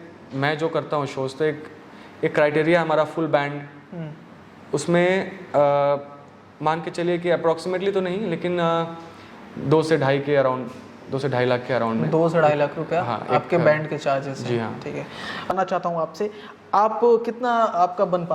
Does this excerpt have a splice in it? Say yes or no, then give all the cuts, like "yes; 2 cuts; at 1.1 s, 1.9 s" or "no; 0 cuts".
yes; 1 cut; at 15.5 s